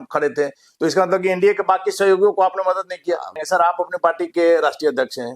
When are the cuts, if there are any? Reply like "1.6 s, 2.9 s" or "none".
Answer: 3.4 s